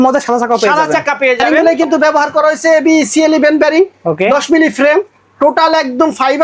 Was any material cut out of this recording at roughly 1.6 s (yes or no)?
yes